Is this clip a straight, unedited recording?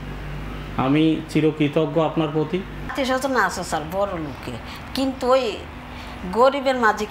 no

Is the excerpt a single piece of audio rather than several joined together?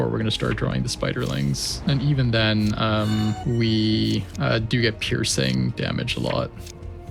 no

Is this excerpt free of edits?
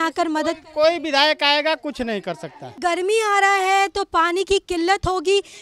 no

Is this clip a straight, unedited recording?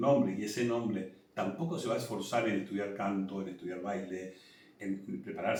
yes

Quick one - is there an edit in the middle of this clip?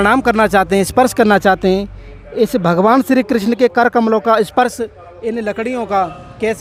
no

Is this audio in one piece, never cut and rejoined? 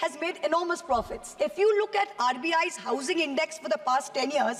yes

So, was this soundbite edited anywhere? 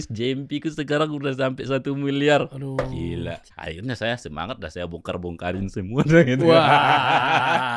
yes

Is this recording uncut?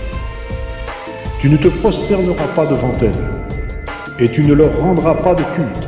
yes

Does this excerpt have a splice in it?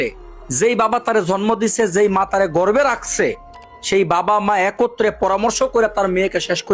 no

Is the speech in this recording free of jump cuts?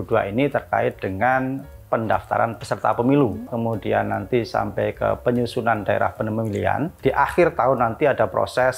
no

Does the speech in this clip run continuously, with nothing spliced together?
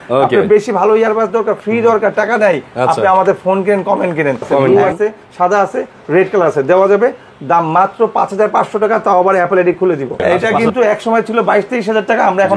no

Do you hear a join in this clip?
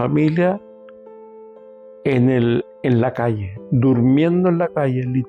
no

